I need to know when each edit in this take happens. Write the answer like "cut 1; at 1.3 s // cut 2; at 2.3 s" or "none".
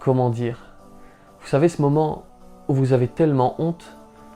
none